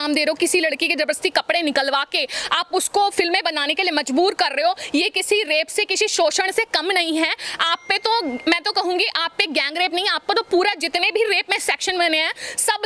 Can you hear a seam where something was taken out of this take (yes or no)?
no